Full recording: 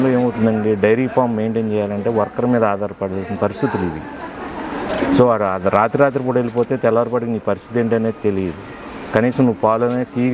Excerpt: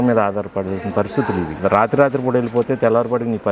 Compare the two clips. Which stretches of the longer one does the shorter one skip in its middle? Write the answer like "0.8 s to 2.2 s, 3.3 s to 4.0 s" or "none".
4.0 s to 5.6 s